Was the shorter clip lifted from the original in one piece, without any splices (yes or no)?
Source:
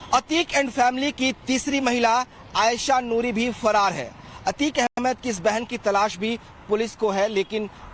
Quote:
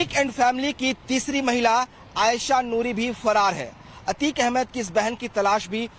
no